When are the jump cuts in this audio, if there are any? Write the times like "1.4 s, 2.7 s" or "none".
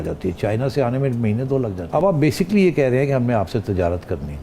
1.8 s